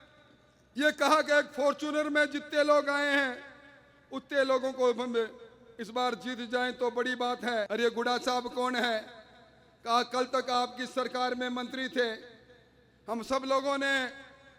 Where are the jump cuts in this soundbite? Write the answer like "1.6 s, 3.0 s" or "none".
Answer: 7.7 s

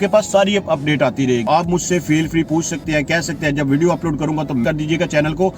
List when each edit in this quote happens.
1.4 s, 4.6 s

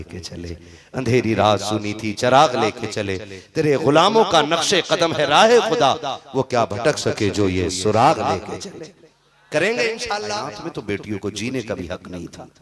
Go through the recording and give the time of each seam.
10.6 s

